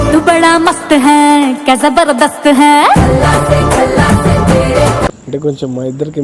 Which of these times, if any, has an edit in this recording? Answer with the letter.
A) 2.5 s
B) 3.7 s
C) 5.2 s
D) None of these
C